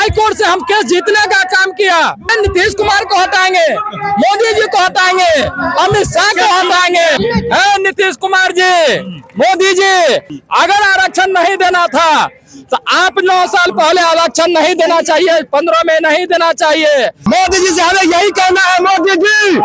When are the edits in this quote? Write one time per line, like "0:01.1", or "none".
0:02.3
0:07.2
0:17.2

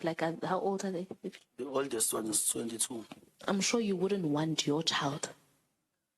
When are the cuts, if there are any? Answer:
0:01.2
0:03.4

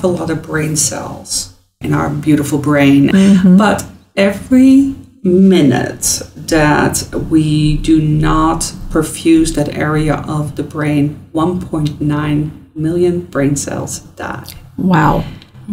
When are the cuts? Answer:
0:01.8
0:03.1

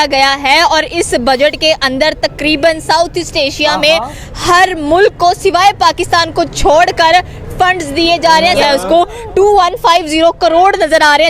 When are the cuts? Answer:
0:08.6

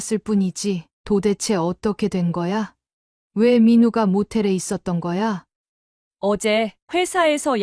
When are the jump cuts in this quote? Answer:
0:00.9
0:05.5

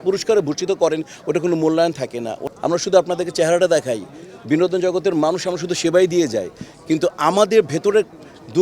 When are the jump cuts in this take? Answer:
0:02.4

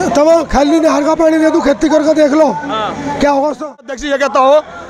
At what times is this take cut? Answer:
0:03.9

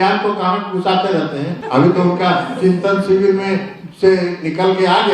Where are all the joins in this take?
0:01.6

